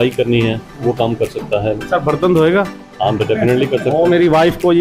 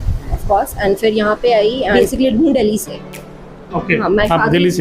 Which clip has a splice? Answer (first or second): second